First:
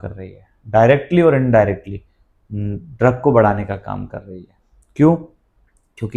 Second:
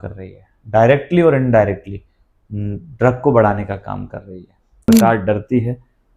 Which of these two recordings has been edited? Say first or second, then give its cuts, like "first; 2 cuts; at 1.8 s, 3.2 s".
second; 1 cut; at 4.6 s